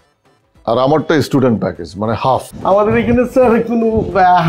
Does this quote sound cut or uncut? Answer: cut